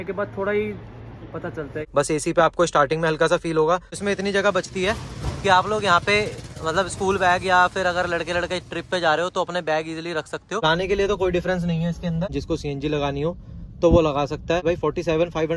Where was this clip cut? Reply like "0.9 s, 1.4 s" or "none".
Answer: 1.8 s, 4.0 s, 10.6 s, 12.4 s, 14.6 s